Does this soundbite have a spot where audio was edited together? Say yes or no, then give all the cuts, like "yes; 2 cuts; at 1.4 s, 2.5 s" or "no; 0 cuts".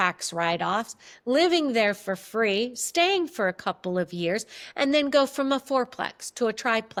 no; 0 cuts